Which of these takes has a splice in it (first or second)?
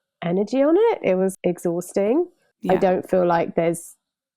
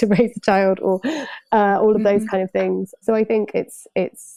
first